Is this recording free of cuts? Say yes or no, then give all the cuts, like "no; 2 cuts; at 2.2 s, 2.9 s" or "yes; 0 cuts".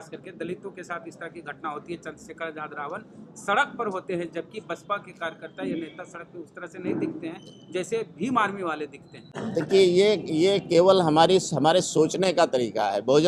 yes; 0 cuts